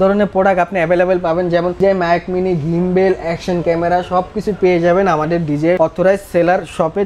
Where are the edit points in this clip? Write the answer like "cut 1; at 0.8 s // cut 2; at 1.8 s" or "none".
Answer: cut 1; at 1.8 s // cut 2; at 5.8 s